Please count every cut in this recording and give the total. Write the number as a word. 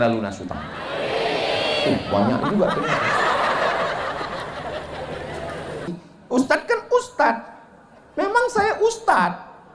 one